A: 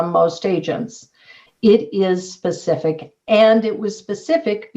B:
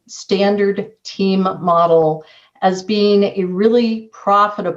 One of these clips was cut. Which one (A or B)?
A